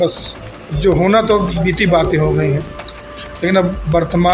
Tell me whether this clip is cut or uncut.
uncut